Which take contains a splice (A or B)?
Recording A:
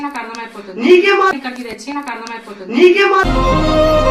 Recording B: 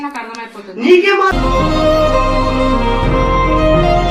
B